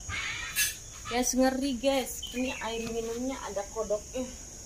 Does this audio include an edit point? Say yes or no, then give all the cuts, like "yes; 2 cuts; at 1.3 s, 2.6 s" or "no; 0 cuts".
yes; 1 cut; at 1.1 s